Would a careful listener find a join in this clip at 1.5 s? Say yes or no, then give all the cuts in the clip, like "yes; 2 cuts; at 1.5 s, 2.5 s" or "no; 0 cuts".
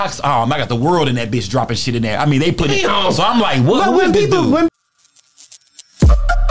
no; 1 cut; at 4.7 s